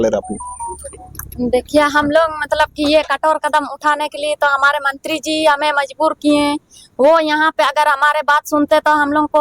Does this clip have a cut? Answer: no; 0 cuts

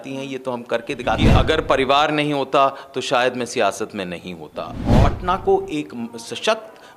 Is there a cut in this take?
yes; 2 cuts; at 1.2 s, 5.0 s

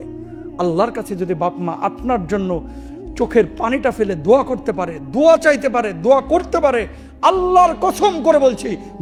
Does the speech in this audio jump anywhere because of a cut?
no; 0 cuts

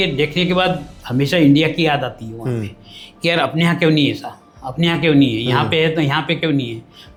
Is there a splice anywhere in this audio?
no; 0 cuts

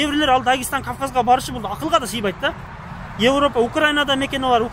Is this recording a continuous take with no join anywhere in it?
yes; 0 cuts

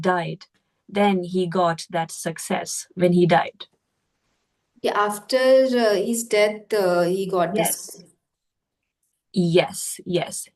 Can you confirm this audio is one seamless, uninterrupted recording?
yes; 0 cuts

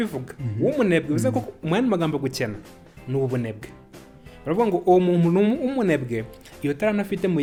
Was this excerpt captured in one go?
yes; 0 cuts

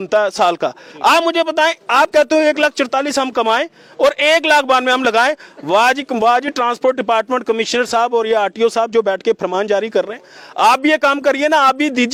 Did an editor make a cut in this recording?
no; 0 cuts

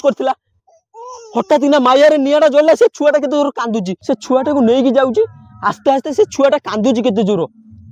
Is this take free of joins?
no; 1 cut; at 3.9 s

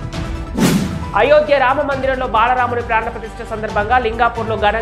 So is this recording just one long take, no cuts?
yes; 0 cuts

